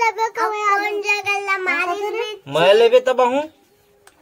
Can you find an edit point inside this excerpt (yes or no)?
no